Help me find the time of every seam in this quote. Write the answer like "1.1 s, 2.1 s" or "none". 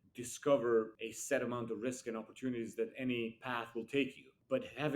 0.9 s

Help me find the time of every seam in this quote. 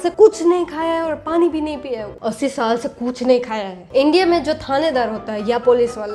2.1 s, 3.9 s

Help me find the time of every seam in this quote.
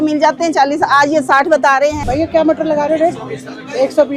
2.0 s

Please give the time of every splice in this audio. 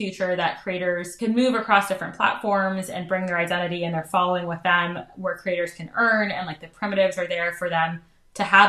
1.1 s

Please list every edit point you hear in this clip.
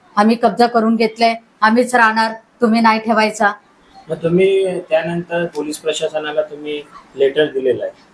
none

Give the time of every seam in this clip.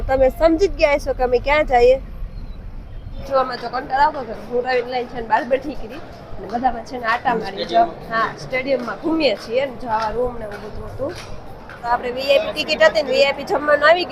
3.2 s, 11.9 s

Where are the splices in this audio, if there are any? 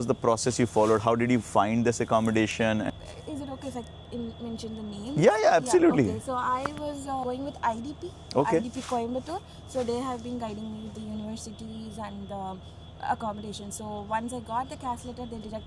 none

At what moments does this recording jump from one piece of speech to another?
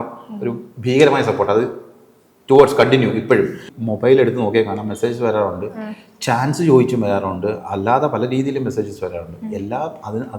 3.6 s

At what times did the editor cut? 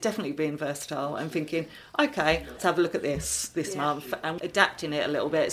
2.6 s, 4.3 s

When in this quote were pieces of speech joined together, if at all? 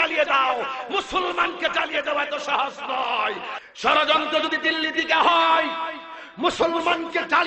3.5 s

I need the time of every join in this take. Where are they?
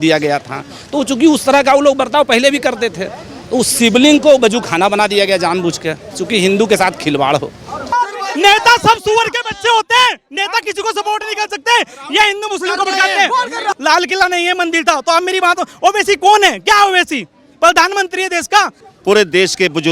7.8 s, 13.8 s, 18.8 s

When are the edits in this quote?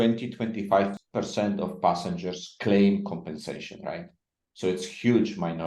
1.0 s

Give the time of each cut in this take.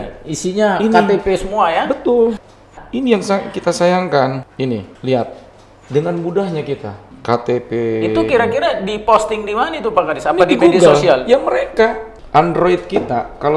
none

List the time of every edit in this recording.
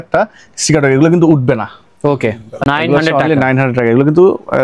none

